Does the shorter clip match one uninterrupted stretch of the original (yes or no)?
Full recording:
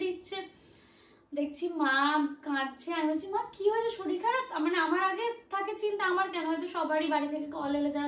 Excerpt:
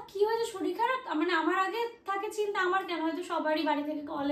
yes